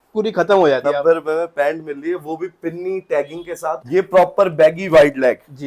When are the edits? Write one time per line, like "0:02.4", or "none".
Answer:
0:00.8
0:03.8

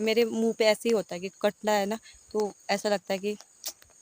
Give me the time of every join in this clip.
none

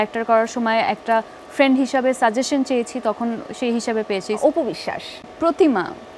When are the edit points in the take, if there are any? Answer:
0:04.4

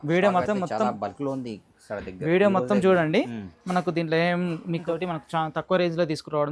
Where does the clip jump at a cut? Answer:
0:04.8

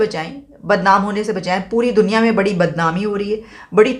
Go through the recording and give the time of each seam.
none

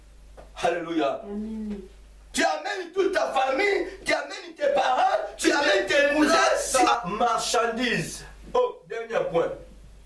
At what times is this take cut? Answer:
0:06.7

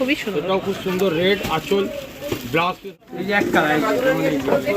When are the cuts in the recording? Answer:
0:03.0

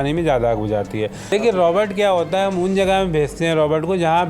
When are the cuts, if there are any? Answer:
0:01.2

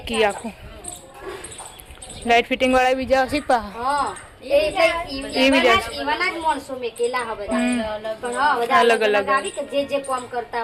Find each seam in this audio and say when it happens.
none

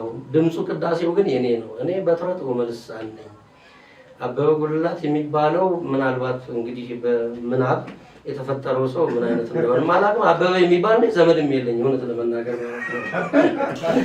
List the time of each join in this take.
none

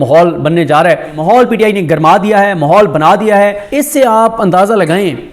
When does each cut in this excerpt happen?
0:01.1
0:03.7

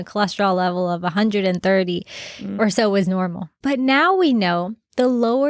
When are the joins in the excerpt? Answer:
0:03.5

